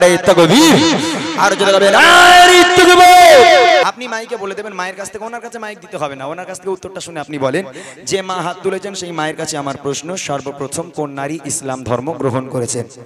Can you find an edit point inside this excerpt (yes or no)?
yes